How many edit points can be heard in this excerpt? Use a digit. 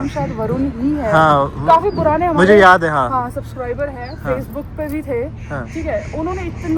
0